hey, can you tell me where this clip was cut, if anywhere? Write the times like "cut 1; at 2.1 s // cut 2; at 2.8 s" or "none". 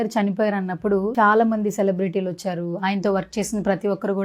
cut 1; at 1.1 s